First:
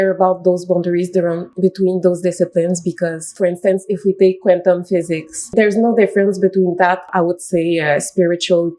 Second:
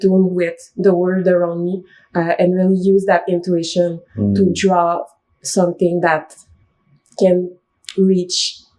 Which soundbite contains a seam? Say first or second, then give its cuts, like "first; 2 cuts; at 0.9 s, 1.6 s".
first; 4 cuts; at 1.5 s, 3.3 s, 5.5 s, 7.1 s